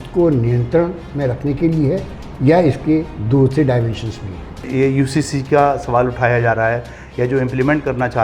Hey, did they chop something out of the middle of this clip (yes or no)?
yes